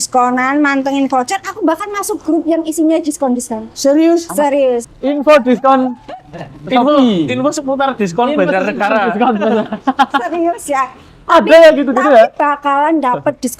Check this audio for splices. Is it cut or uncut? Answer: cut